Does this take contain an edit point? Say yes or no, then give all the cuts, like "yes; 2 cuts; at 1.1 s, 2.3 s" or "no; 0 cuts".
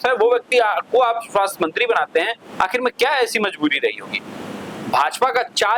no; 0 cuts